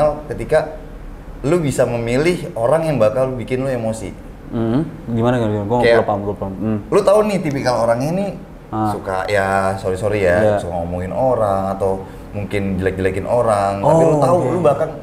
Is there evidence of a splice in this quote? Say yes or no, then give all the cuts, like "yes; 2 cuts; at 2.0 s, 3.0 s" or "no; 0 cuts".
no; 0 cuts